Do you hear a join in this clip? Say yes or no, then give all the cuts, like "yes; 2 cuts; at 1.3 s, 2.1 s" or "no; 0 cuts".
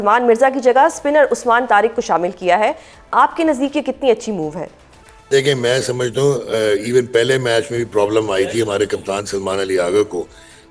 no; 0 cuts